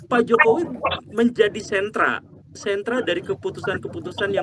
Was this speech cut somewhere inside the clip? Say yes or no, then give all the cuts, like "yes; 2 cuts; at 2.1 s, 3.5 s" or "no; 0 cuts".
no; 0 cuts